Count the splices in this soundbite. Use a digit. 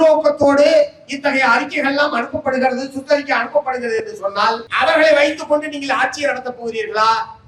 1